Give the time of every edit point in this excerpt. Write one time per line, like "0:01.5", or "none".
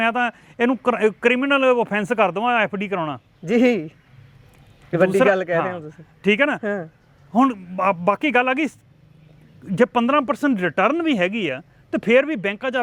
none